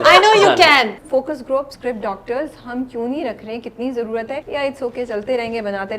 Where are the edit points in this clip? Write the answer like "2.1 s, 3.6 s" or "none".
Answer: 1.0 s, 1.7 s, 4.4 s